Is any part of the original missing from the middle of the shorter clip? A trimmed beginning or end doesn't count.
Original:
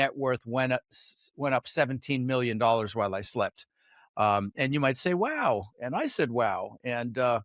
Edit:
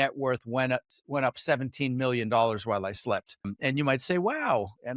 yes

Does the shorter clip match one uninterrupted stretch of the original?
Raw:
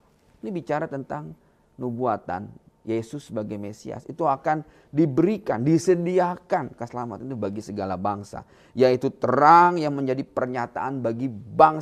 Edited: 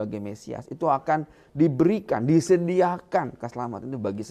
yes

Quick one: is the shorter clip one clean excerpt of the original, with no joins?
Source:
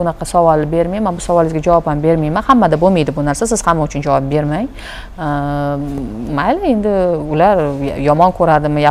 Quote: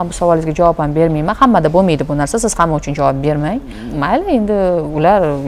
no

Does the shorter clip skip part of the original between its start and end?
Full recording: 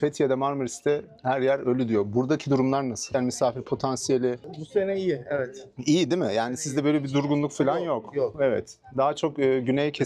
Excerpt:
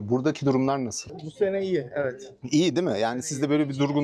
yes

